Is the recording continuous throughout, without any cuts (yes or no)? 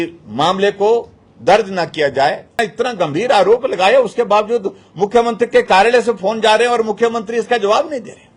no